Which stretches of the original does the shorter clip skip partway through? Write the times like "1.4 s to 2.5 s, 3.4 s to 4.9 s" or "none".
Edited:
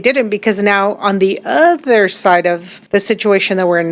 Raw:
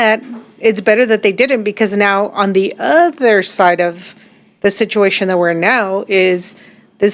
4.1 s to 4.4 s

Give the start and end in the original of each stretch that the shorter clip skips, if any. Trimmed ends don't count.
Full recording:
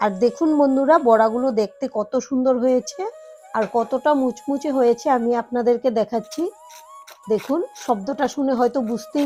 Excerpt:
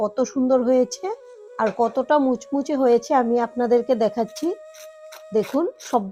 none

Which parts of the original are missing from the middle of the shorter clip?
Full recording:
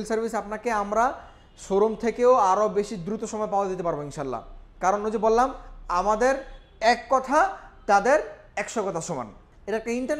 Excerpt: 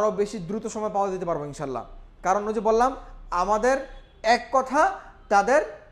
none

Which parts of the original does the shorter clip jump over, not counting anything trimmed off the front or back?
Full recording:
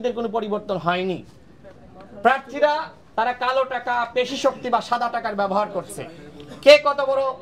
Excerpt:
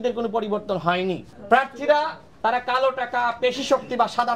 1.3 s to 2.0 s

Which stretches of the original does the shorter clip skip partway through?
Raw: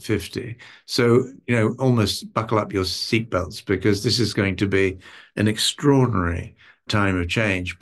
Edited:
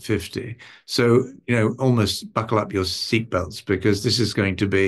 none

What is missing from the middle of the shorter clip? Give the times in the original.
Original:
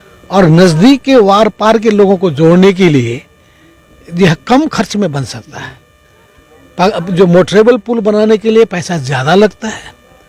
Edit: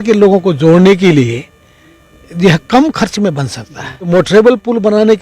5.9 s to 7.3 s

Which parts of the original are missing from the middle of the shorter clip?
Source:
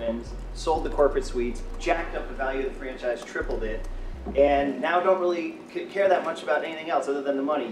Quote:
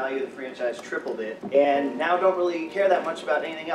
3.8 s to 4.2 s, 5.5 s to 5.9 s

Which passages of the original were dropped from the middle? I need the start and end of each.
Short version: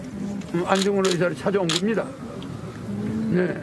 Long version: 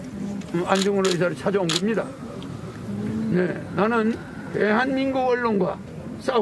none

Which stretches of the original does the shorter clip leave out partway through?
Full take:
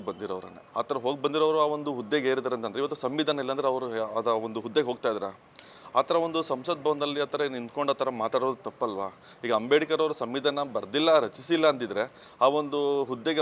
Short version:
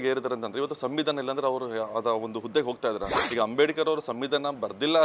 5.4 s to 9.3 s

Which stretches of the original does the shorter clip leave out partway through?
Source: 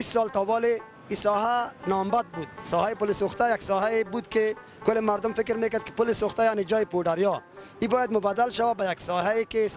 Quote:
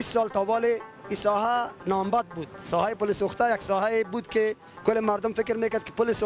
none

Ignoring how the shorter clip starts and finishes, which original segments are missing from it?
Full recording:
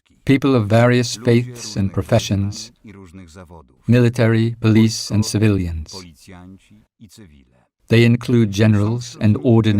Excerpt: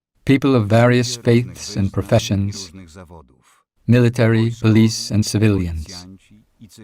5.9 s to 6.3 s

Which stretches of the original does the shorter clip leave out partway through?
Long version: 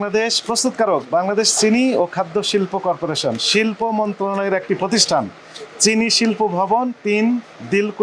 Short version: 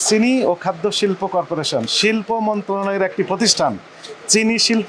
none

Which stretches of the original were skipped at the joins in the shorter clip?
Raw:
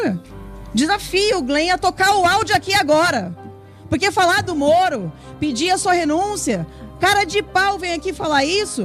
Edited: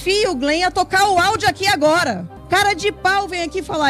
3.4 s to 6.8 s

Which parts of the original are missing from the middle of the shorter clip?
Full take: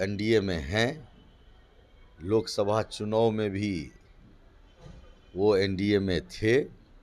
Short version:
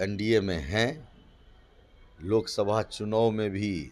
none

